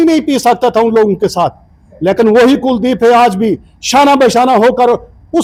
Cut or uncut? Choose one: uncut